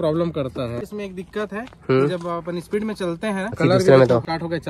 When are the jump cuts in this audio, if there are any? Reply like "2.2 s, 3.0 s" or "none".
0.9 s, 3.6 s